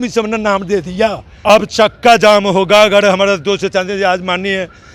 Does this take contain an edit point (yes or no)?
yes